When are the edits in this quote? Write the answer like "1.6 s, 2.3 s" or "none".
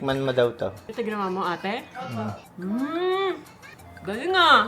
0.8 s, 2.5 s